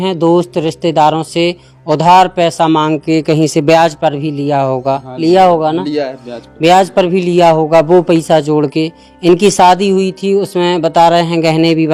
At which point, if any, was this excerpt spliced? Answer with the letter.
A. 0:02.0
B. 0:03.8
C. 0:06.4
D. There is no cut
D